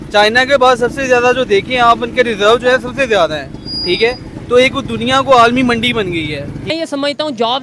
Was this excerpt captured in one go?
no; 1 cut; at 6.6 s

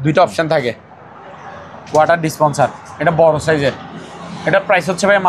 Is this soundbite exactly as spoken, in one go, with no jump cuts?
yes; 0 cuts

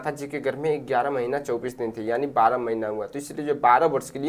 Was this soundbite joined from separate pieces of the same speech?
no; 0 cuts

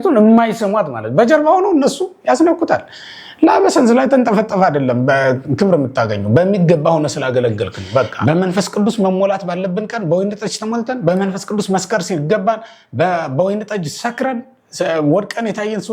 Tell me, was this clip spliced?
yes; 1 cut; at 8.1 s

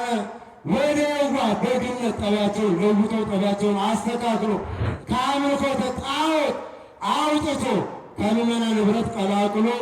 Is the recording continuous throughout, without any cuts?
no; 1 cut; at 4.8 s

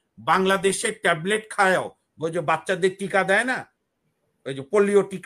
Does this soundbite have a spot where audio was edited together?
no; 0 cuts

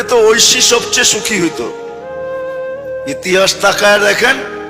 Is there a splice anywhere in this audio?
no; 0 cuts

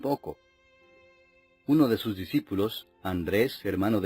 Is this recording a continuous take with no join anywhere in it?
no; 1 cut; at 2.2 s

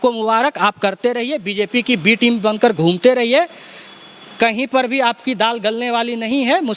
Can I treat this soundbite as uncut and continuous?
yes; 0 cuts

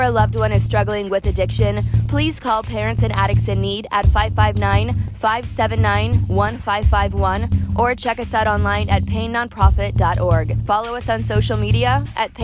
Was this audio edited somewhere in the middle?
no; 0 cuts

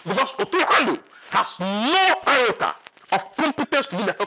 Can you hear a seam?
no; 0 cuts

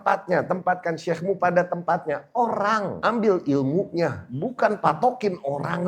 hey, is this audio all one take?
no; 2 cuts; at 3.0 s, 4.2 s

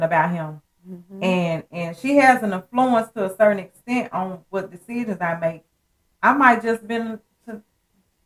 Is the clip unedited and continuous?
yes; 0 cuts

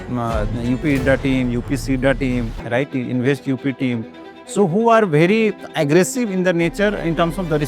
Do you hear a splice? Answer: no; 0 cuts

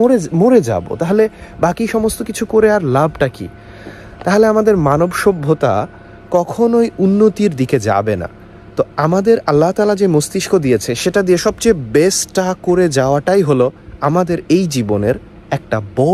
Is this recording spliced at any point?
no; 0 cuts

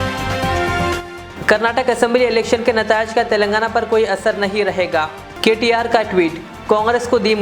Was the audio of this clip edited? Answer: no; 0 cuts

